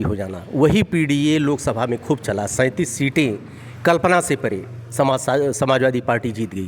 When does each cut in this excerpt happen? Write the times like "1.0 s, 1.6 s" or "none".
none